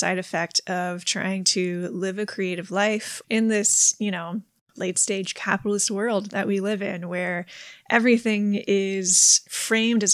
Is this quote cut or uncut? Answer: cut